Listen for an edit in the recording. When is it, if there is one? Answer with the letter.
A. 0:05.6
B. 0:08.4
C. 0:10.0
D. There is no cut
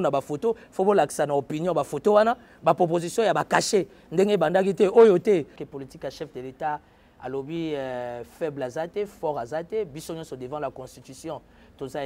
A